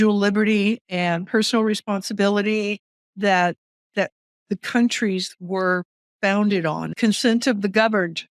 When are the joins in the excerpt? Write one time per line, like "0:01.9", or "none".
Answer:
0:06.9